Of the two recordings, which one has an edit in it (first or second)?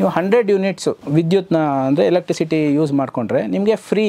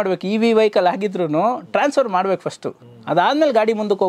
first